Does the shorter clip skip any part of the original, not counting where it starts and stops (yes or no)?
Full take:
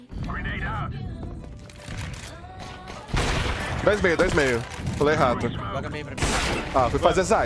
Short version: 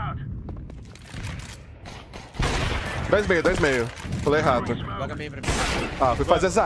no